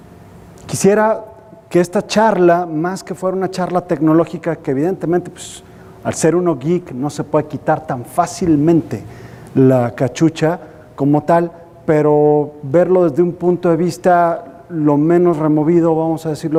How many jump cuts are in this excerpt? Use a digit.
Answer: 0